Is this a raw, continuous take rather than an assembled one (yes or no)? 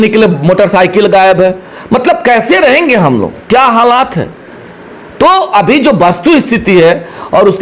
yes